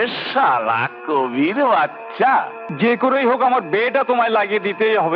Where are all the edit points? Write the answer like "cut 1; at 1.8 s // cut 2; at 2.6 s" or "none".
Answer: cut 1; at 2.6 s